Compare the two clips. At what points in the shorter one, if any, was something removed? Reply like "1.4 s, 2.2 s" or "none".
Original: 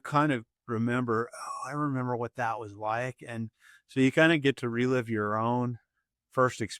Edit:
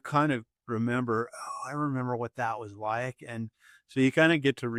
none